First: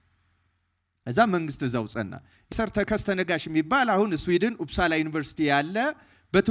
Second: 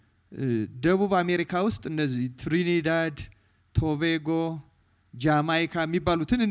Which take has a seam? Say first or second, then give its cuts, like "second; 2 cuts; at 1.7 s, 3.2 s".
first; 1 cut; at 2.5 s